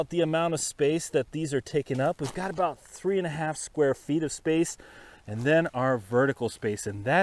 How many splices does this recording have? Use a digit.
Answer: 0